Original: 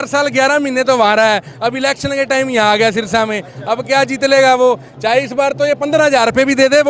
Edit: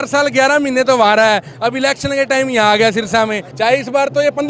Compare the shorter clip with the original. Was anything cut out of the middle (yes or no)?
yes